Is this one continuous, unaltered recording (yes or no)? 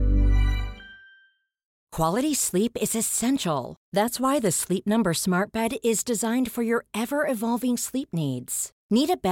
no